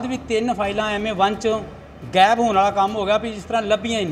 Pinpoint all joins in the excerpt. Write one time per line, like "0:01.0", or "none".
none